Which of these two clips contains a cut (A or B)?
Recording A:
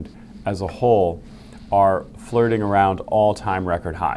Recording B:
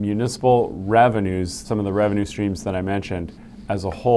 B